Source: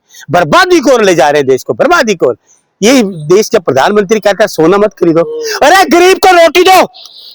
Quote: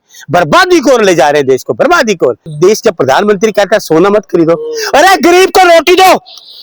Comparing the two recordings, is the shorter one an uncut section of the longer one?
no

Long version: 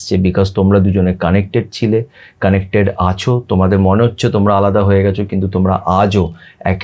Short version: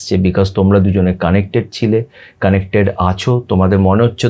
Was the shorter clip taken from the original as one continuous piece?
yes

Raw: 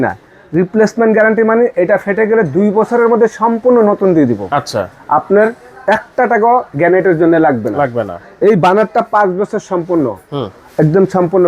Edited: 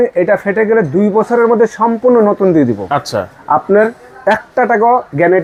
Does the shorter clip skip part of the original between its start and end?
no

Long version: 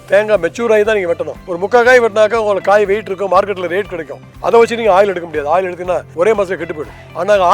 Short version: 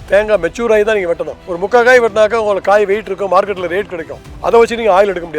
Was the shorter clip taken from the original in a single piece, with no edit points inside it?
yes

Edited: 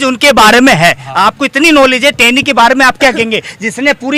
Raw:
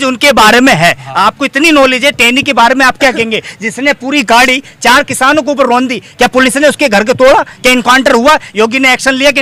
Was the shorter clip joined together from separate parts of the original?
no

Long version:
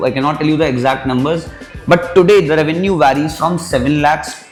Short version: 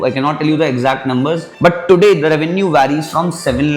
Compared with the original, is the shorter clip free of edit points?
no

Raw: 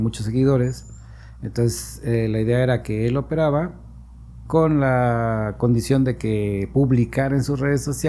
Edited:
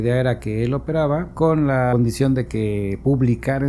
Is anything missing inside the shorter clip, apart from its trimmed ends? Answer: yes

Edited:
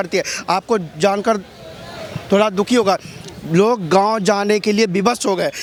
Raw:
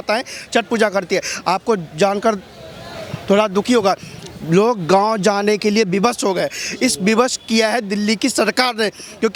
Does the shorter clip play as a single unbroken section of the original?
yes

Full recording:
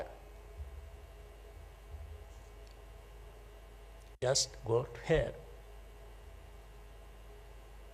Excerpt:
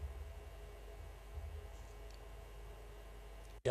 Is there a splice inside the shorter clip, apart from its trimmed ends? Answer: no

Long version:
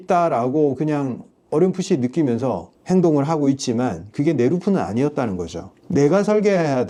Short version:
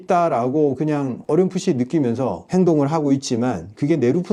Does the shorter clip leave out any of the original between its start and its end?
yes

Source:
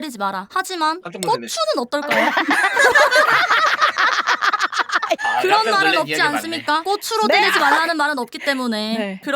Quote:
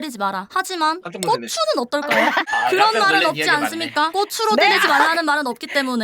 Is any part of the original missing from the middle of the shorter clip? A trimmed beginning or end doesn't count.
yes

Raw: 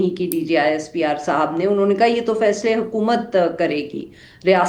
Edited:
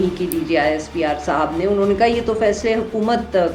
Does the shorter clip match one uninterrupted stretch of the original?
yes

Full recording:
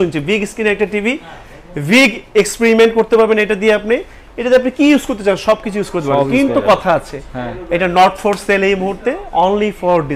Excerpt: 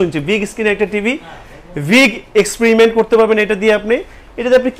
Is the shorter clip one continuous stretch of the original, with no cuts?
yes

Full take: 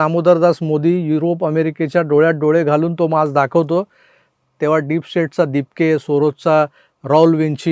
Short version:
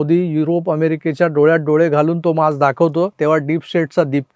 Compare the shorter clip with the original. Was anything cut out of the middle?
yes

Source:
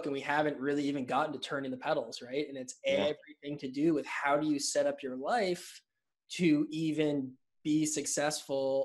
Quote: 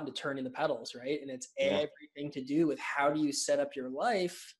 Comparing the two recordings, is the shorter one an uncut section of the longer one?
yes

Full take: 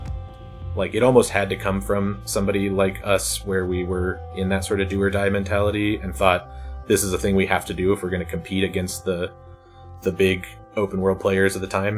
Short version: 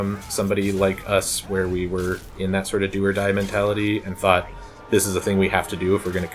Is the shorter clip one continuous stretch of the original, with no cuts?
yes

